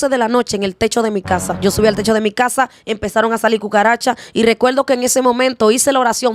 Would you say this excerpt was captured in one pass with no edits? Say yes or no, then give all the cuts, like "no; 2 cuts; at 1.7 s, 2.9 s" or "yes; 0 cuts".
no; 1 cut; at 1.5 s